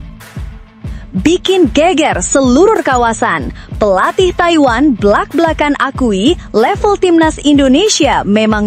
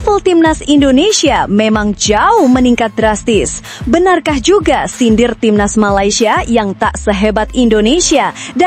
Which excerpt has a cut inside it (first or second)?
first